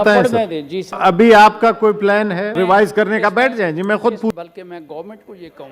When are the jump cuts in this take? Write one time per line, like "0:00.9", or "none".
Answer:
0:01.0
0:02.5
0:04.3

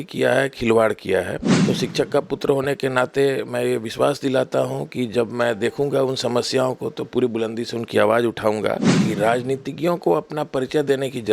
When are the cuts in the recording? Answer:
0:01.5
0:08.9

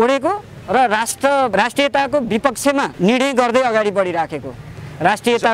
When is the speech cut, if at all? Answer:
0:01.5
0:02.9

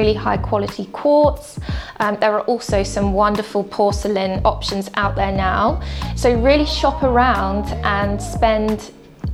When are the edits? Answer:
none

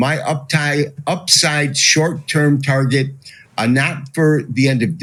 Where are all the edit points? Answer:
none

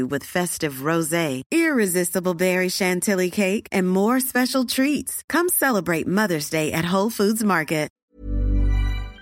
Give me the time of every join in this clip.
0:07.9

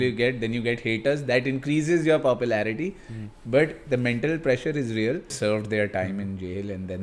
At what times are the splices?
0:05.3

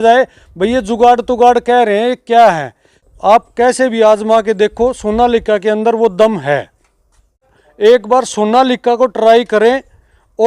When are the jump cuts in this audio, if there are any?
0:03.0
0:07.6

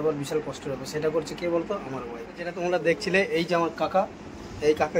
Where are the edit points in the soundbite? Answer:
0:02.6

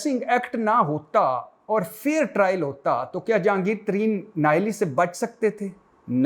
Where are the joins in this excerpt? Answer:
none

